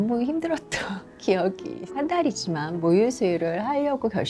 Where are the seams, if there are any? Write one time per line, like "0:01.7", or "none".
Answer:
0:01.9

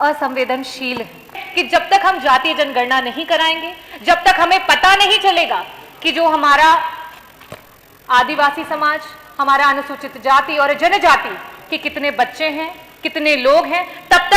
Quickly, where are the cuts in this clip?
0:01.5

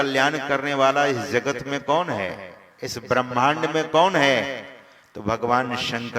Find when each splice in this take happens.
none

